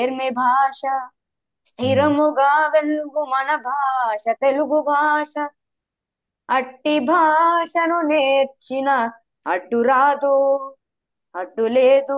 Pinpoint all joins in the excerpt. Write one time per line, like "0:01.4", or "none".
none